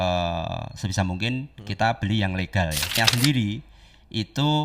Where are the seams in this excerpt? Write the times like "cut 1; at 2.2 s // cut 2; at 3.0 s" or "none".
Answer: cut 1; at 3.0 s